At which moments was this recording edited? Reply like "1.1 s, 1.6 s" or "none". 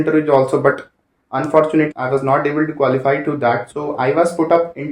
1.9 s, 3.6 s